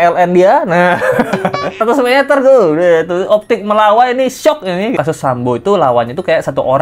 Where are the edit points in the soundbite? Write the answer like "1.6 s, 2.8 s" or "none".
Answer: 1.8 s, 5.0 s